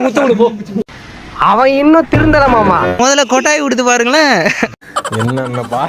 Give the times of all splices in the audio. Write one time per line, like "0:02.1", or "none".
0:03.0